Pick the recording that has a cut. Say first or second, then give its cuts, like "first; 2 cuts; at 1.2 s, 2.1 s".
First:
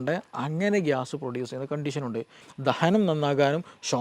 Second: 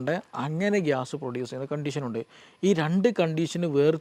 first; 1 cut; at 2.4 s